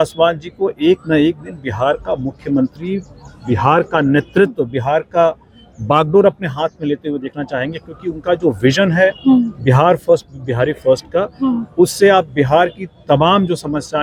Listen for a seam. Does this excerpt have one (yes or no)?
no